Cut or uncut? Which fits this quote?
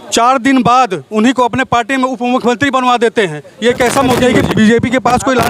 cut